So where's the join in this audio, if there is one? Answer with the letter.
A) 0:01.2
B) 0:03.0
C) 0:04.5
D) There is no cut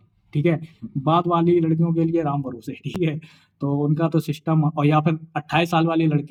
D